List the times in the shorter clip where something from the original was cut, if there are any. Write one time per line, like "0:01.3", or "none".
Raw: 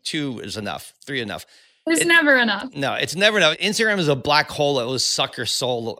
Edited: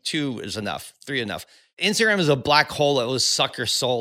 0:01.8